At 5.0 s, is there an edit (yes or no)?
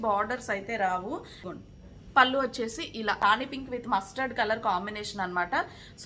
no